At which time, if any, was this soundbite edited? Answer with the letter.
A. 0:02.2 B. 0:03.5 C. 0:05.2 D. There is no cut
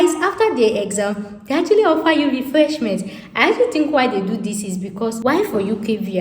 C